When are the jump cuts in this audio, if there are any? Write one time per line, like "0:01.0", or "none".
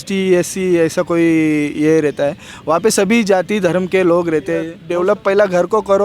0:04.8